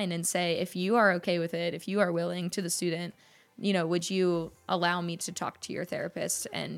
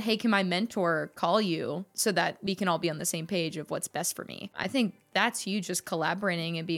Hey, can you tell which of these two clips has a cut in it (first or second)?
second